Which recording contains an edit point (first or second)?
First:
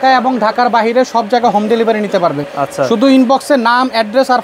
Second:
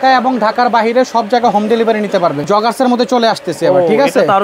second